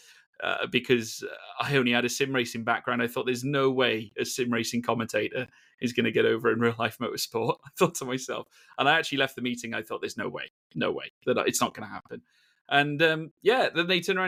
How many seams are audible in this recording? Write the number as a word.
zero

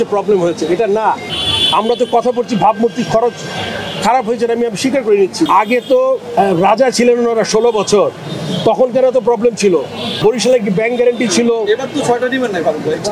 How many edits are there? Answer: three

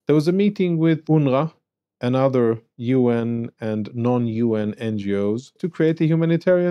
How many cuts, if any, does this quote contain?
two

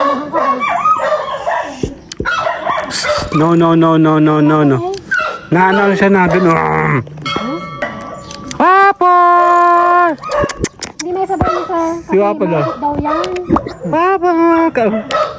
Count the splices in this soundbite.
one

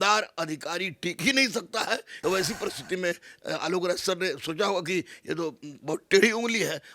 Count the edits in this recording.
one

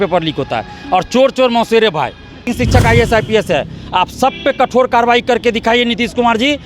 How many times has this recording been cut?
one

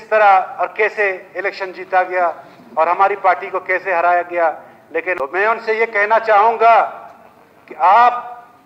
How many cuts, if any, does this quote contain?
one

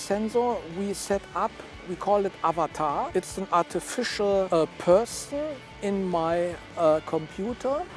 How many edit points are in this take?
three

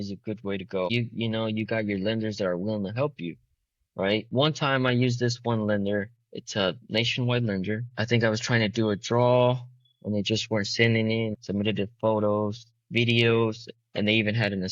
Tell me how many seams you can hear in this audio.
two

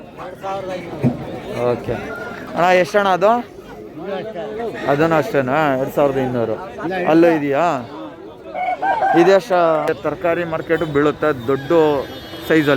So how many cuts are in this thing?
one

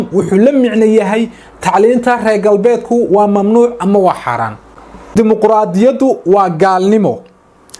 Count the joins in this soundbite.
one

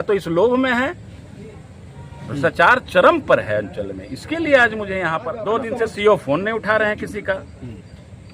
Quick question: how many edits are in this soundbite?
one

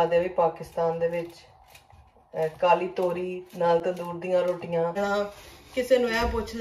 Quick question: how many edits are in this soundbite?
one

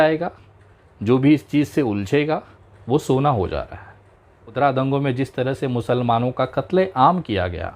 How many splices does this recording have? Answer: one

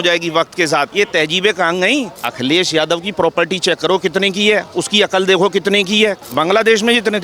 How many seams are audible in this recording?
three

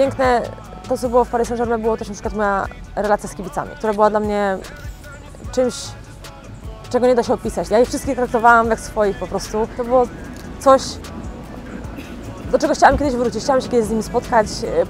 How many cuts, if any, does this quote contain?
three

